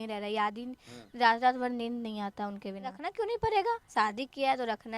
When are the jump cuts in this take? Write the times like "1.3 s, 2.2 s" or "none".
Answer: 3.0 s